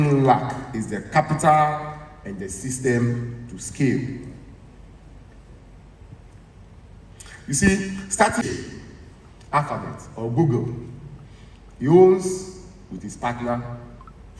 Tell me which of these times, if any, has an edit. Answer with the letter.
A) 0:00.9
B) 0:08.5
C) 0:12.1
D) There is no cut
B